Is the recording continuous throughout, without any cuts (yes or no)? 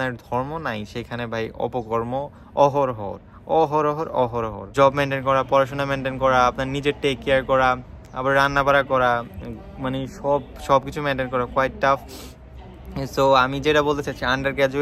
no